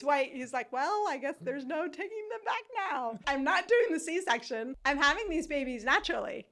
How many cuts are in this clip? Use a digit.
2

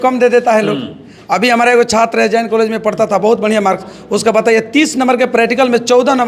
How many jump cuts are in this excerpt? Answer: 0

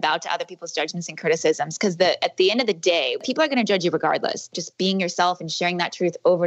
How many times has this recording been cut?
2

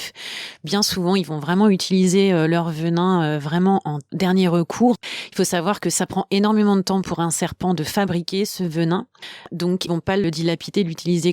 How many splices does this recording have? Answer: 2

